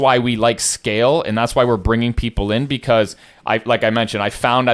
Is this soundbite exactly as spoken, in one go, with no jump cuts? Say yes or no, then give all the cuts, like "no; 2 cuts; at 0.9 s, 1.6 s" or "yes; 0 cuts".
yes; 0 cuts